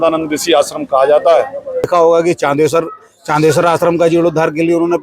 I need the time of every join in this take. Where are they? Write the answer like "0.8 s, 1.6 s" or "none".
1.9 s